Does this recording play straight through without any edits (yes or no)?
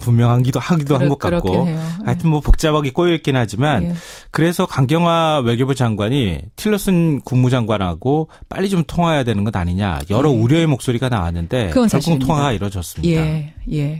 yes